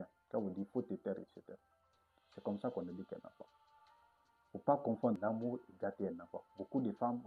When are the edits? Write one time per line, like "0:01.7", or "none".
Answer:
0:05.2